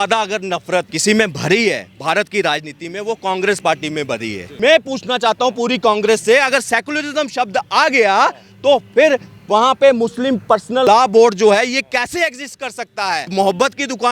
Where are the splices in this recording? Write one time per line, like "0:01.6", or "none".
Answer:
0:00.9
0:04.5
0:10.9
0:13.3